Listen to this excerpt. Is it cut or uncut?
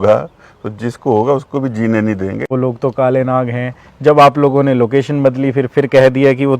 cut